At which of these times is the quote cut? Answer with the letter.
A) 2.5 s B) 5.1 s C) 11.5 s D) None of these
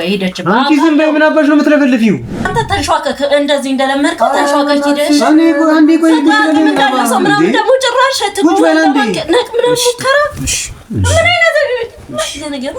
A